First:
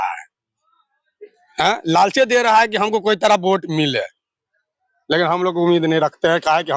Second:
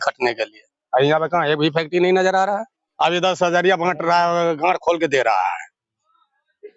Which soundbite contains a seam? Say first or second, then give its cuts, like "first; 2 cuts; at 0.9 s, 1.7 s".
second; 1 cut; at 2.8 s